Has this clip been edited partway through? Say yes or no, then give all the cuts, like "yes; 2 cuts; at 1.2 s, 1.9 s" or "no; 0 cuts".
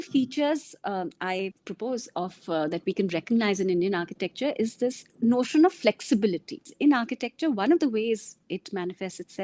yes; 3 cuts; at 1.6 s, 5.0 s, 6.7 s